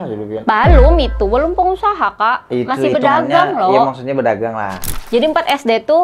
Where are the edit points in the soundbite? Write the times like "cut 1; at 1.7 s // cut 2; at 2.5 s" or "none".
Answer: cut 1; at 4.9 s